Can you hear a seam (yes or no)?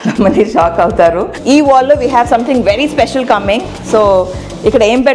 yes